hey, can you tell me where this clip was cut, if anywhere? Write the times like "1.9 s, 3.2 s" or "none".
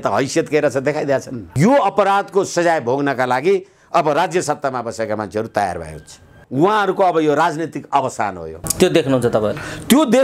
1.5 s, 6.4 s, 8.6 s

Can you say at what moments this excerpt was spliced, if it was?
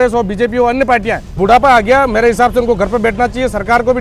1.3 s

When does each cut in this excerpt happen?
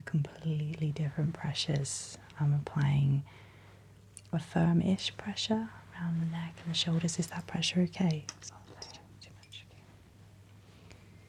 none

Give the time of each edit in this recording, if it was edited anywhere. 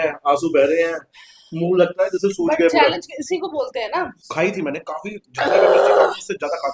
4.2 s

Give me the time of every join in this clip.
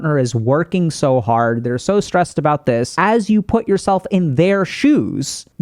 2.9 s

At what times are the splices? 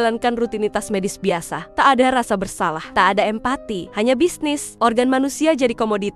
1.6 s, 2.8 s, 3.8 s, 4.7 s

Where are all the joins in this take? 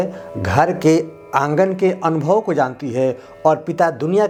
none

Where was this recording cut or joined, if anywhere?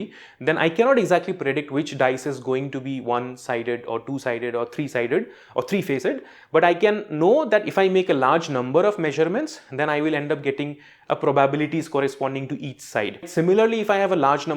13.3 s

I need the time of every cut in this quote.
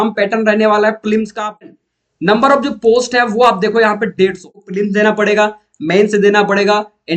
1.6 s, 4.6 s

